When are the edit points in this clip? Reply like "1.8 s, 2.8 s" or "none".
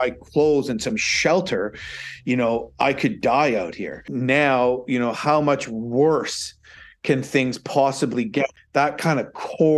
4.1 s, 8.5 s